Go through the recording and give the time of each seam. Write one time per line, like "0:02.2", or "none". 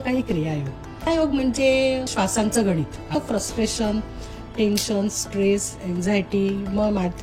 0:01.1
0:02.1
0:03.1

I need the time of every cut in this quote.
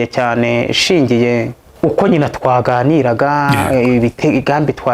0:01.6

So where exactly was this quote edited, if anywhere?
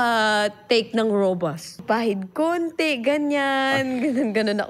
0:01.8

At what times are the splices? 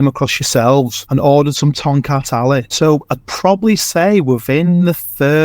0:01.0
0:02.7

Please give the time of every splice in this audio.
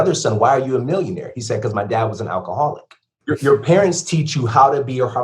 0:03.2

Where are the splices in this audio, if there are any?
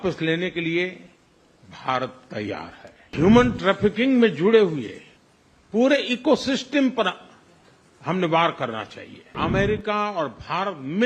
0:03.1
0:09.3

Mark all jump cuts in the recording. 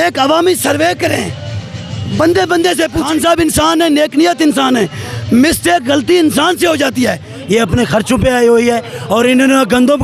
0:03.0
0:07.3

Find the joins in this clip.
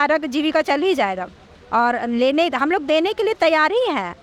none

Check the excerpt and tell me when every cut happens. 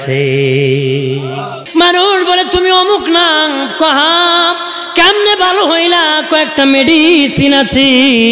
0:01.5

